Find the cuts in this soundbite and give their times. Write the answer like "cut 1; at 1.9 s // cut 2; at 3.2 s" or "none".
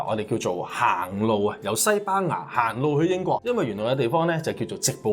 cut 1; at 3.4 s